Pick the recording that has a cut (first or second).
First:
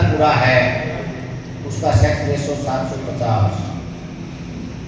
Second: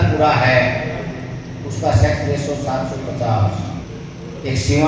second